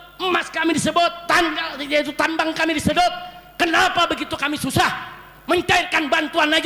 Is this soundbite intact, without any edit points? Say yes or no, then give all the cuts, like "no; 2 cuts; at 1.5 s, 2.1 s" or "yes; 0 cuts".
yes; 0 cuts